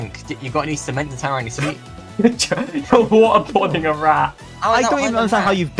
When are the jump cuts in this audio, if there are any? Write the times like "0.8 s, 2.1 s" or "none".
1.9 s, 4.4 s